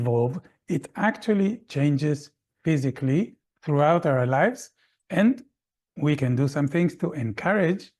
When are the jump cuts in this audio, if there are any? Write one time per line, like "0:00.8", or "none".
0:03.5